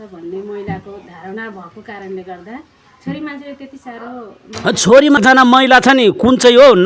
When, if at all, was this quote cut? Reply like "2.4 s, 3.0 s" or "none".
5.2 s